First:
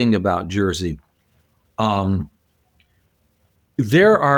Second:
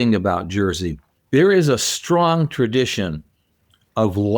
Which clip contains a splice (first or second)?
second